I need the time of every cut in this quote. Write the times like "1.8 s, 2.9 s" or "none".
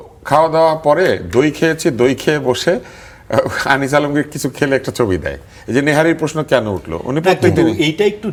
none